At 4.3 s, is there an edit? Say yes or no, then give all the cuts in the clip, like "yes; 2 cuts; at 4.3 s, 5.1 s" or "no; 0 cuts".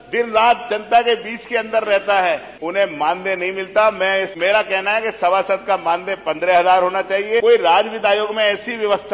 yes; 3 cuts; at 2.5 s, 4.3 s, 7.4 s